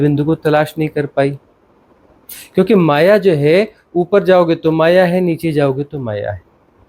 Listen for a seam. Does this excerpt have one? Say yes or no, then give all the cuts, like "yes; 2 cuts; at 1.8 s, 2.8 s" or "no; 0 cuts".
no; 0 cuts